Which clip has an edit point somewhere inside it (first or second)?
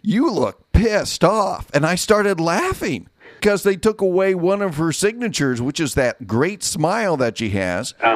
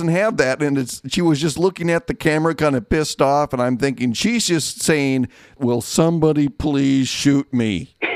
first